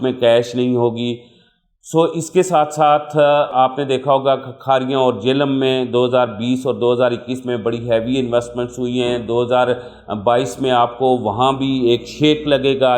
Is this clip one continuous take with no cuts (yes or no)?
yes